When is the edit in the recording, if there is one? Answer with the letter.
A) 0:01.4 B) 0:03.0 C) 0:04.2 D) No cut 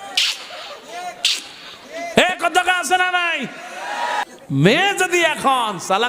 C